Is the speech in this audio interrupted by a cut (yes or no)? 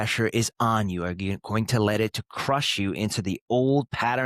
no